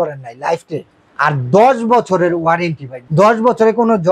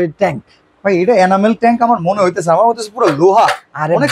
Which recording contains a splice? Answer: first; 2 cuts; at 1.0 s, 2.9 s

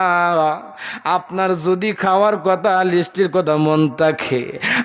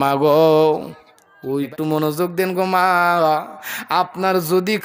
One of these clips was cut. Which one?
second; 1 cut; at 1.7 s

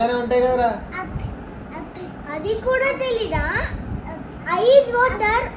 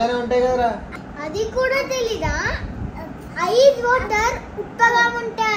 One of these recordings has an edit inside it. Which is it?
second; 1 cut; at 1.0 s

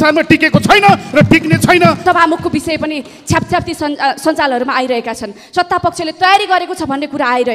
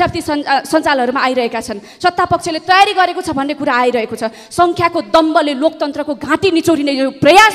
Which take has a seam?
first; 1 cut; at 2.0 s

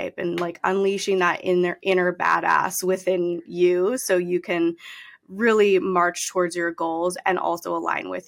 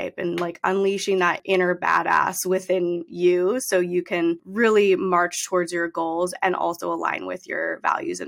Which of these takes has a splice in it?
second; 2 cuts; at 1.4 s, 4.5 s

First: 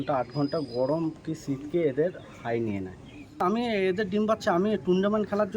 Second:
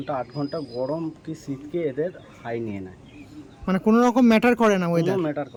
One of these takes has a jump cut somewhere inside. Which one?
first; 1 cut; at 3.4 s

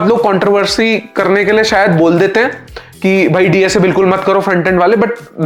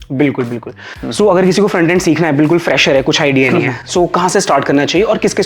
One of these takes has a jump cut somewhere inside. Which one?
second; 1 cut; at 0.9 s

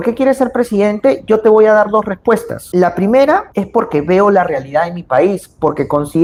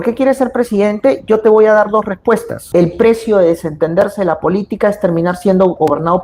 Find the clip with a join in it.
second; 1 cut; at 2.7 s

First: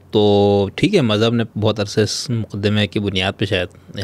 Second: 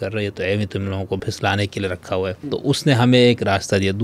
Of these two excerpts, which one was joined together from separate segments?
second; 2 cuts; at 1.2 s, 2.4 s

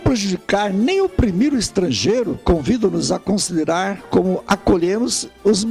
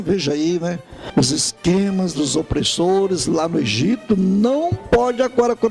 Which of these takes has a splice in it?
second; 1 cut; at 1.0 s

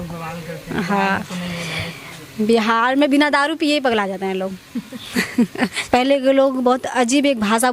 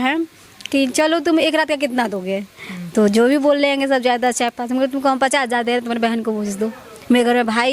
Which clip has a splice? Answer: first; 1 cut; at 5.8 s

